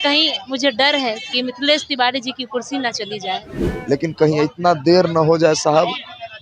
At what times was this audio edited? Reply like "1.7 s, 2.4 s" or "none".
3.5 s